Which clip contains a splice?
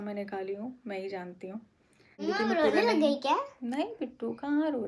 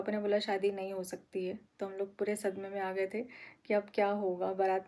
first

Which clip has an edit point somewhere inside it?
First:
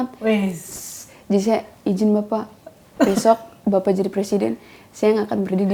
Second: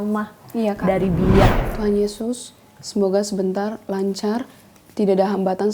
second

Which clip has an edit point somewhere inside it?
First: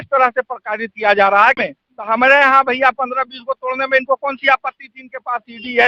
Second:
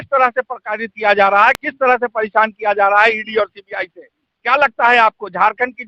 first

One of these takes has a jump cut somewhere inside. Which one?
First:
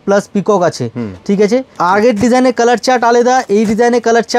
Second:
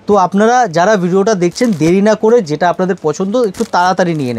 first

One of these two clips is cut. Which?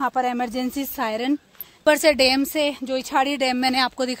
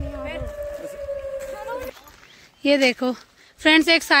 first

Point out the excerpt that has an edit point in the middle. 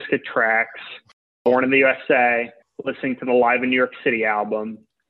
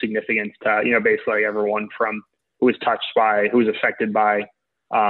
first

